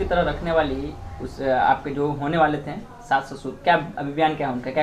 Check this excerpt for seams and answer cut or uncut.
uncut